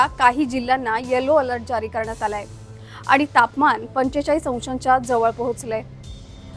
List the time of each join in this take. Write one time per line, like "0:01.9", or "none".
0:02.4